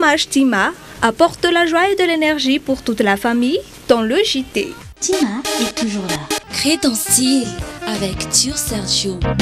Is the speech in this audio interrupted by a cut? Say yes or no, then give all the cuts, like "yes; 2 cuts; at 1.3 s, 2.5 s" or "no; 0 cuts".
yes; 1 cut; at 6.4 s